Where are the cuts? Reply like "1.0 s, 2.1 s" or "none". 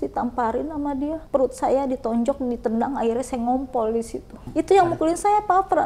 1.2 s, 4.4 s